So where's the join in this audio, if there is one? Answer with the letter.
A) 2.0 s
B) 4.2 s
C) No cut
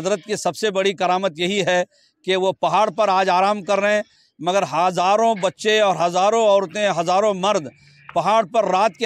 C